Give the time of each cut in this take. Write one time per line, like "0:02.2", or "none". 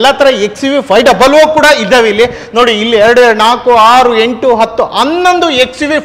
none